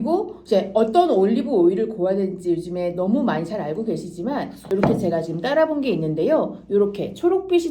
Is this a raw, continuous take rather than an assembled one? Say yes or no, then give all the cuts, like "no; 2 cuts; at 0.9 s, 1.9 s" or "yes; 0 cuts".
no; 1 cut; at 4.7 s